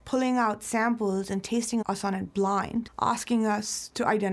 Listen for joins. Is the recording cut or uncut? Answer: cut